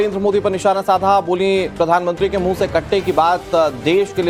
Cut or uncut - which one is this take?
uncut